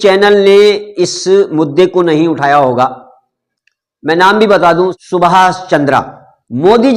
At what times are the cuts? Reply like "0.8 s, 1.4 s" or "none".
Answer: 5.0 s